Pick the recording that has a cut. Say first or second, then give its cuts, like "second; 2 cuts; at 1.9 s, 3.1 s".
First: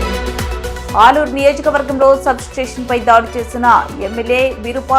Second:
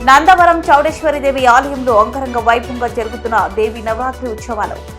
first; 1 cut; at 0.9 s